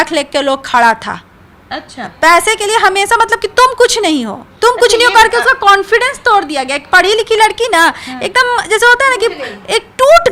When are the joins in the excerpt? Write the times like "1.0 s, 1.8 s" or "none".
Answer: none